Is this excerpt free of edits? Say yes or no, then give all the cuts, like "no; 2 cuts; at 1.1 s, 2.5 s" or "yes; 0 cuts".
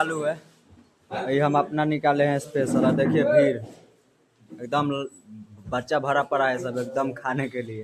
yes; 0 cuts